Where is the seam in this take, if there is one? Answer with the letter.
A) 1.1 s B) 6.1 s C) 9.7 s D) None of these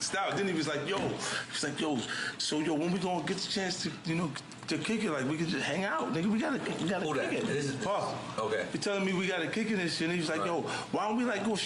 D